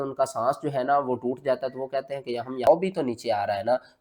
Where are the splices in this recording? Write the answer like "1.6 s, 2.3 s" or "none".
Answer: 2.7 s